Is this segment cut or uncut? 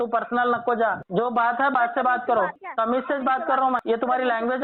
cut